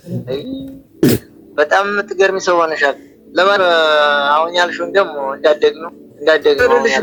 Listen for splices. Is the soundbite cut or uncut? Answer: uncut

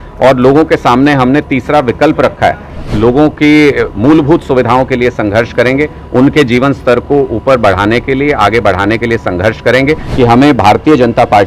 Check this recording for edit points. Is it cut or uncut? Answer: cut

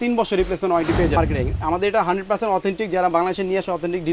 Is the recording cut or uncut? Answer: cut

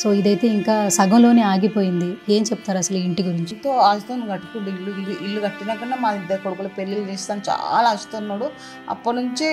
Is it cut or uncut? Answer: cut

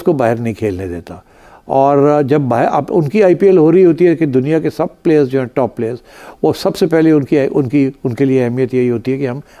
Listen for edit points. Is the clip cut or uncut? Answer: uncut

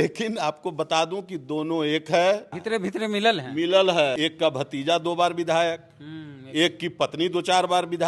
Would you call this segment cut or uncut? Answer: cut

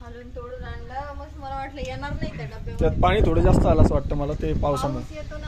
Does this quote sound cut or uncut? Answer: uncut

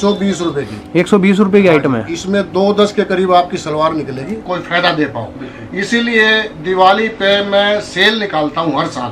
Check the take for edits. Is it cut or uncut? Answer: cut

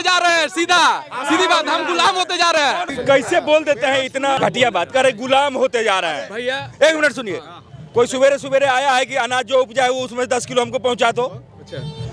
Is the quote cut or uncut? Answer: uncut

